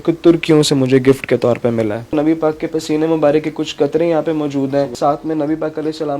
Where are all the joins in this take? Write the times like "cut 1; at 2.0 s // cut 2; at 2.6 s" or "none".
cut 1; at 2.0 s // cut 2; at 4.9 s